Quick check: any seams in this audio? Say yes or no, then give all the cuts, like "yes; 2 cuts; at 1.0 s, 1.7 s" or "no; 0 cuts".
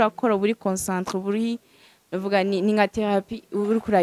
no; 0 cuts